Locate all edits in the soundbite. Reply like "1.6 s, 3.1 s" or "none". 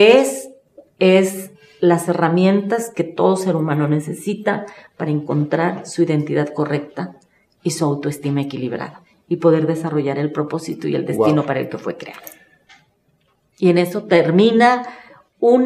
none

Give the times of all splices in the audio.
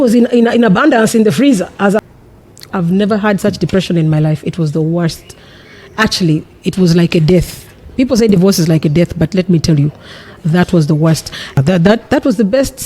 2.0 s, 11.6 s

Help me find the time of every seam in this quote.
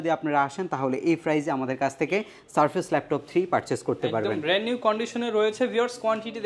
none

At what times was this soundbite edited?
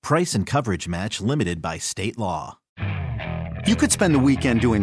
2.6 s

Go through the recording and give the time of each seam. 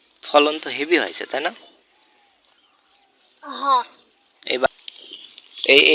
4.7 s

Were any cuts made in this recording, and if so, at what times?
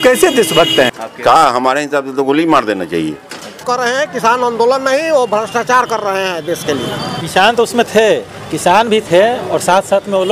1.0 s, 3.6 s, 7.1 s

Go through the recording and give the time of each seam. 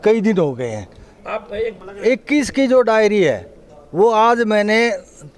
1.8 s

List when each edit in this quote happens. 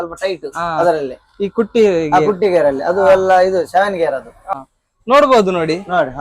4.5 s

